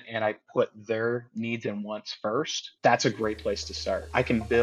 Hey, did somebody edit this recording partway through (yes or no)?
no